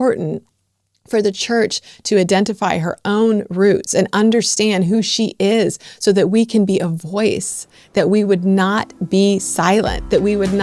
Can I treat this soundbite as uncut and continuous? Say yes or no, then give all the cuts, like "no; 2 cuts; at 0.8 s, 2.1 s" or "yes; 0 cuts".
yes; 0 cuts